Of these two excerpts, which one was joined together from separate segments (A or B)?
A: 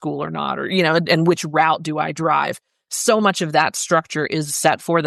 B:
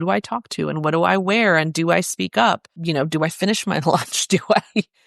B